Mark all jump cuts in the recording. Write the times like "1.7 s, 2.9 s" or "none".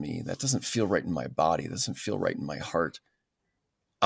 none